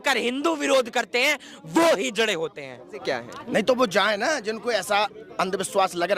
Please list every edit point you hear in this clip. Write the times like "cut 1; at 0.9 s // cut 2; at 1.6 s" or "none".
cut 1; at 3.0 s